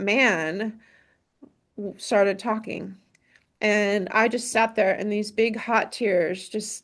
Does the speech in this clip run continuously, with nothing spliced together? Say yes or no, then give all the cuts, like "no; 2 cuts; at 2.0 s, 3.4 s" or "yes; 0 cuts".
yes; 0 cuts